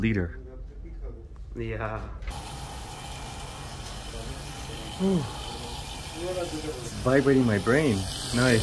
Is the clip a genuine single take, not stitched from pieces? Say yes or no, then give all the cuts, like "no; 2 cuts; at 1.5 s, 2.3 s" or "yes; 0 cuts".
no; 1 cut; at 2.3 s